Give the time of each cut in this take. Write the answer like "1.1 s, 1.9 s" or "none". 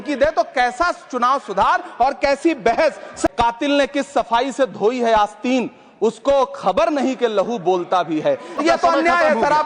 3.3 s, 8.6 s